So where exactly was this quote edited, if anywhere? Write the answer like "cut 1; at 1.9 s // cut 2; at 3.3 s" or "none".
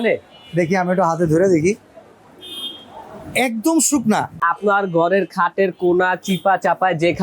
cut 1; at 4.4 s